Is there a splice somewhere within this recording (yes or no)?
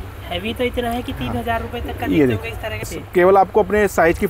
yes